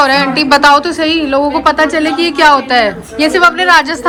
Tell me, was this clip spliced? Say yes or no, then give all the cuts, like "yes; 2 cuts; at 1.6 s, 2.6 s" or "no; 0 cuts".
no; 0 cuts